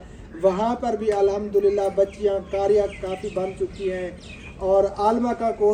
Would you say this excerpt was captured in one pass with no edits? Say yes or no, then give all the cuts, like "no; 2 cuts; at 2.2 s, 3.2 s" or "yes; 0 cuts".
yes; 0 cuts